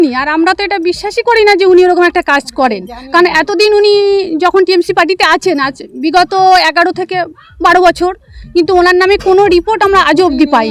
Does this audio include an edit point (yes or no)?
no